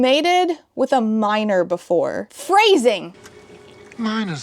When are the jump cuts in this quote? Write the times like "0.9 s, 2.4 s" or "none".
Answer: 2.3 s